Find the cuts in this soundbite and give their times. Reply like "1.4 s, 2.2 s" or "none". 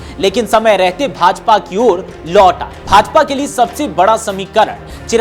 2.7 s

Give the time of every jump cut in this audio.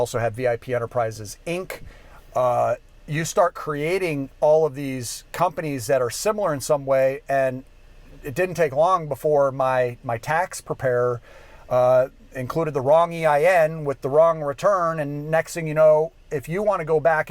none

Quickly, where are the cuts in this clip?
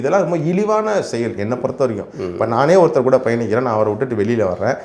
none

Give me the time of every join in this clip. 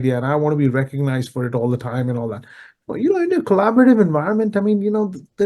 none

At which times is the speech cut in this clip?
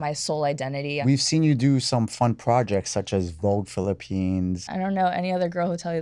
1.0 s, 4.6 s

